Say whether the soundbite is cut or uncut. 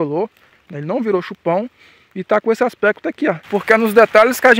cut